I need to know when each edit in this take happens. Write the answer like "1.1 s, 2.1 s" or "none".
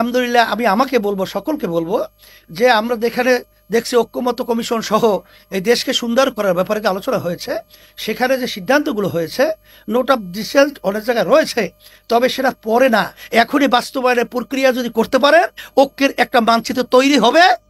none